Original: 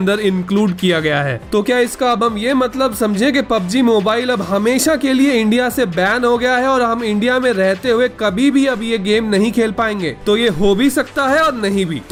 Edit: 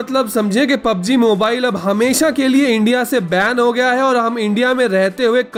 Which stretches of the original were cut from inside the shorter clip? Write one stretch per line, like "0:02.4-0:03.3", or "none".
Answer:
none